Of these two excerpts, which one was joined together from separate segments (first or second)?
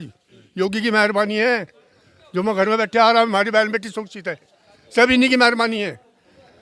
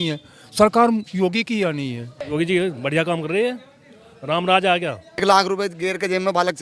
second